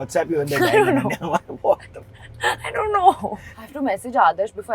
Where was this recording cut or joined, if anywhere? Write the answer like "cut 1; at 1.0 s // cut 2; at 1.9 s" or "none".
cut 1; at 3.3 s